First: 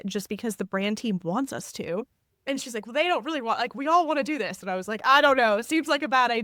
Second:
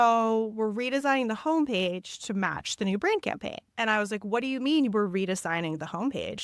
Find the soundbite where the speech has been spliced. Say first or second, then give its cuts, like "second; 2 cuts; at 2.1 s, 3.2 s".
second; 1 cut; at 3.6 s